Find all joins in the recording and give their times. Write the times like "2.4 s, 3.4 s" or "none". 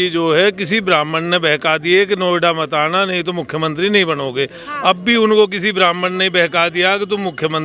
none